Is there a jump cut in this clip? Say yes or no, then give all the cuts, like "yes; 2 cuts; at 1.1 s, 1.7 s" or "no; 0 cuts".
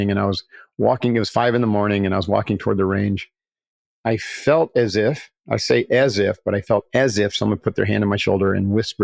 yes; 1 cut; at 3.8 s